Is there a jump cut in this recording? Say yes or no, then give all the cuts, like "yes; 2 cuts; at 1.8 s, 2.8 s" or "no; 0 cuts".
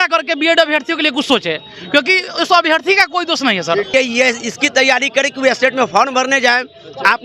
yes; 1 cut; at 3.9 s